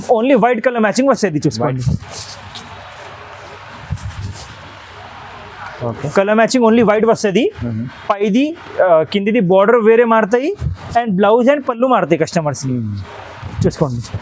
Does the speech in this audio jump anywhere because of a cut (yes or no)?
no